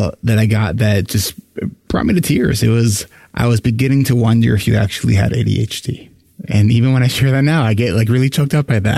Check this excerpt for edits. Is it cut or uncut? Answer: uncut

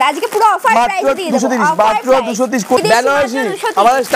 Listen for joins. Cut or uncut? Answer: cut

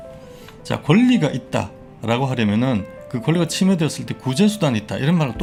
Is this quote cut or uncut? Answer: uncut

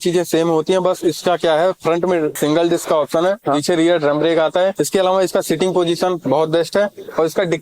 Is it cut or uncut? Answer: cut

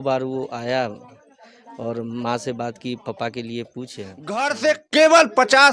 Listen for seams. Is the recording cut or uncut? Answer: cut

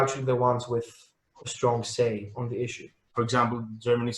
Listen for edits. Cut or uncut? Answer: cut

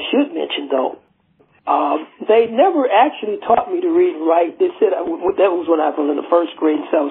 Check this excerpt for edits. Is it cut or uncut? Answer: cut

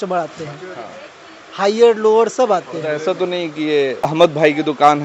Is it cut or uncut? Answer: cut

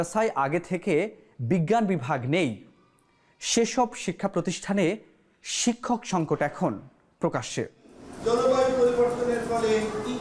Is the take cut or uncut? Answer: uncut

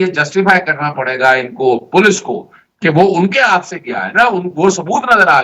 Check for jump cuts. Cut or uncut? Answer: uncut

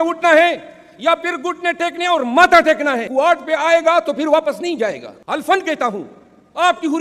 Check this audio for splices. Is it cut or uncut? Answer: cut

